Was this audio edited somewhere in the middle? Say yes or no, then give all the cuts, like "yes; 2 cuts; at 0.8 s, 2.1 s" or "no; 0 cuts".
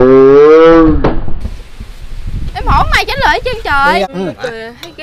yes; 1 cut; at 4.1 s